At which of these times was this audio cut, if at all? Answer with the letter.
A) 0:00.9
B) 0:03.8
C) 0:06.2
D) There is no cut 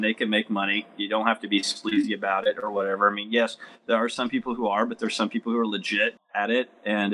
C